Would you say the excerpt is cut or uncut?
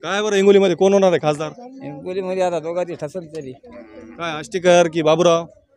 uncut